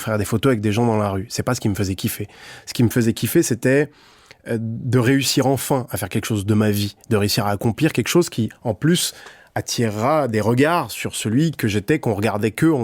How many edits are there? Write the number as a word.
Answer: zero